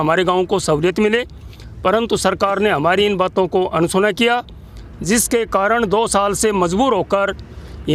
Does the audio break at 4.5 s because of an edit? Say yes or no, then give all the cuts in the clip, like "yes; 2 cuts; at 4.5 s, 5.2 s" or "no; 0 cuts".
no; 0 cuts